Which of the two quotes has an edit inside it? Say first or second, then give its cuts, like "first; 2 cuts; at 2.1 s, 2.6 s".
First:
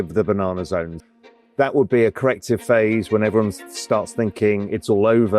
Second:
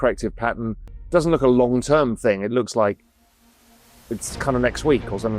first; 1 cut; at 1.0 s